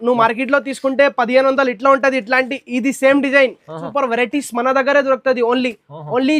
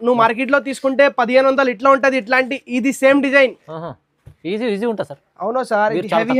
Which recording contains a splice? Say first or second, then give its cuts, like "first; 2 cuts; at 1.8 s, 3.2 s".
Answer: first; 1 cut; at 3.8 s